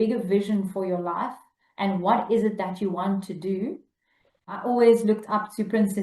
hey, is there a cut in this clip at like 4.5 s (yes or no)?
yes